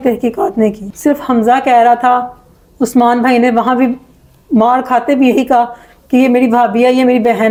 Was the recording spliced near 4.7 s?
no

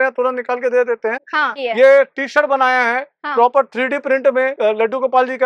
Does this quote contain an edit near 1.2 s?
no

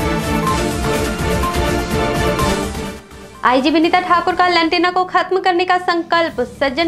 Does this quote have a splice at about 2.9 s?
no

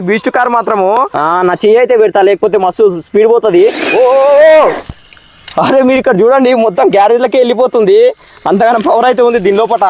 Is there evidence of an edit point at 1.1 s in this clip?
yes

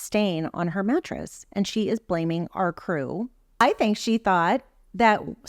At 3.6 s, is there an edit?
yes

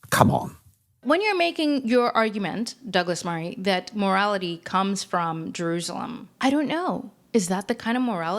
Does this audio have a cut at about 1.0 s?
yes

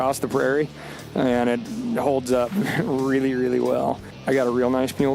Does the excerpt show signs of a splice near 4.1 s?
yes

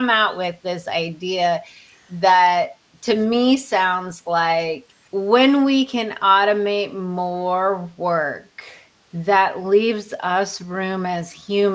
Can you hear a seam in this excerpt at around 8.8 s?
no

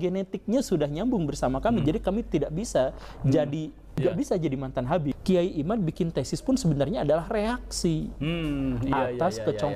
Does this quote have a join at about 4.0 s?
yes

